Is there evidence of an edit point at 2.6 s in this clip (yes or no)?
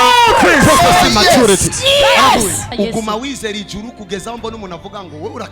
yes